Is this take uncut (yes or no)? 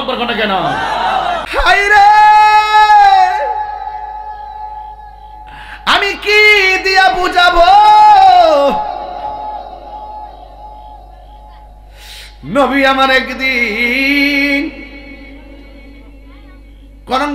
no